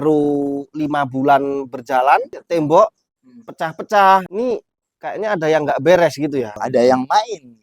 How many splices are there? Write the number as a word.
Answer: three